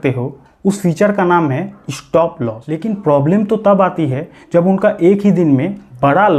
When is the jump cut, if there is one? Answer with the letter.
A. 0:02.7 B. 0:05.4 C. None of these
A